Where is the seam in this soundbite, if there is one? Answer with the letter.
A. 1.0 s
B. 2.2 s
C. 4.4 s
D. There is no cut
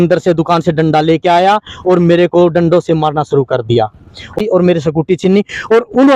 C